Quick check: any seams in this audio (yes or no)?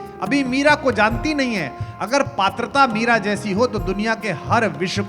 no